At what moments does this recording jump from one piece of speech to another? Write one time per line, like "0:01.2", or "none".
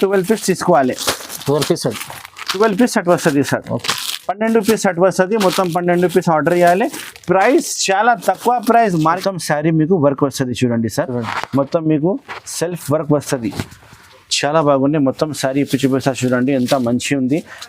0:09.2